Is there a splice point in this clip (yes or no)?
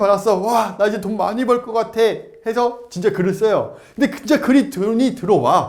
no